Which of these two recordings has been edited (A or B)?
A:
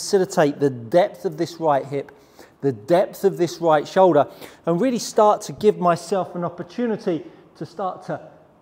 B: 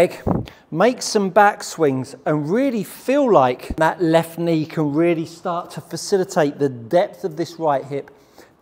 B